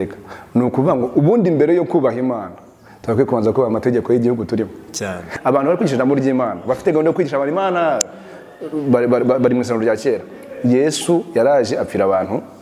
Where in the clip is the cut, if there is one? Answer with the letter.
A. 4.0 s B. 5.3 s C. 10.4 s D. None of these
B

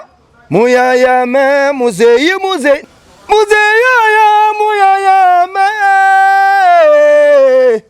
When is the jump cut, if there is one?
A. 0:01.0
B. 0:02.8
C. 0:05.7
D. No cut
B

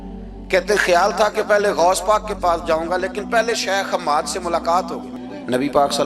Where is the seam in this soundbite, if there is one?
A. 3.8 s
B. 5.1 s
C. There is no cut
B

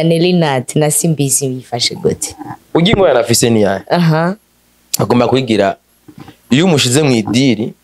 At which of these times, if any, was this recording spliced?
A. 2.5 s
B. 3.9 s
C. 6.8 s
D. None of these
A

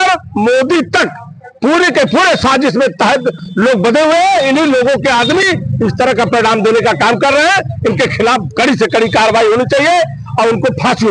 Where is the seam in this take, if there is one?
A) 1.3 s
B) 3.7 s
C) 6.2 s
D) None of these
D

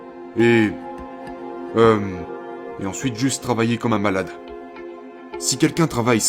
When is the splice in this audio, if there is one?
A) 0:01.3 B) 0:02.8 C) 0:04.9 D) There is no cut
C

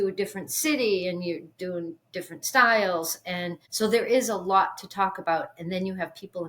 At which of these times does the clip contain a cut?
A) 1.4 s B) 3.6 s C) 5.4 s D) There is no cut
B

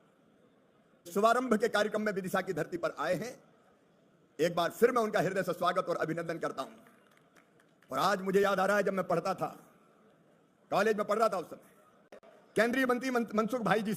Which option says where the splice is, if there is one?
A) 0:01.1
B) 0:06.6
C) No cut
A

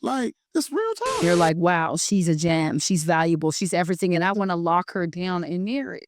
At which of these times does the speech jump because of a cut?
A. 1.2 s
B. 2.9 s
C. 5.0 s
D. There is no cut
A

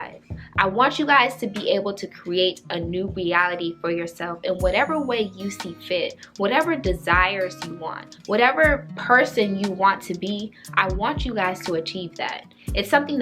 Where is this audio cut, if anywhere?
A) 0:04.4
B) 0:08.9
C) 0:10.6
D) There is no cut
B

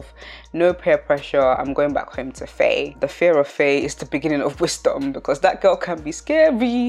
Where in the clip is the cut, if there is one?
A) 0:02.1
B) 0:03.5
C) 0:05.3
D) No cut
D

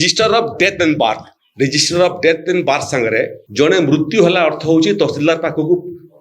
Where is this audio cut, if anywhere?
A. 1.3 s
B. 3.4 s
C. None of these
B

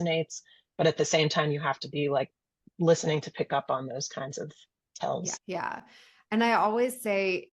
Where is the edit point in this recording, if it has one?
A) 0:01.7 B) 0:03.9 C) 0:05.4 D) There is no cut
C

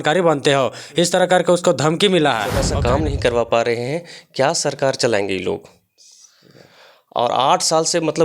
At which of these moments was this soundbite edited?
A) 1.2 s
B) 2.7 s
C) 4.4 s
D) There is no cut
B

